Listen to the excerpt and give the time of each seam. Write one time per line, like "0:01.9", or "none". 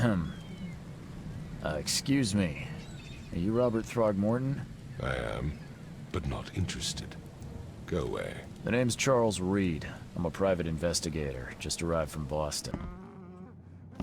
0:12.6

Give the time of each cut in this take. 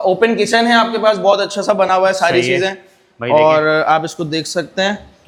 none

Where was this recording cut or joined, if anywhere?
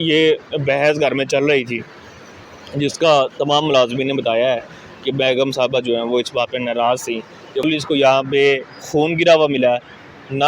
0:07.6

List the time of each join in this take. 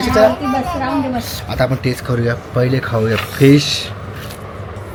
none

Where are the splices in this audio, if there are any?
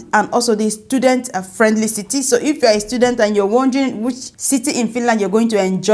0:04.2

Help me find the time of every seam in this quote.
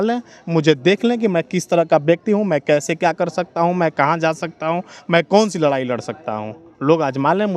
none

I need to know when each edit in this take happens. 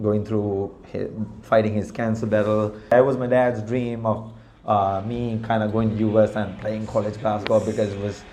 0:02.9

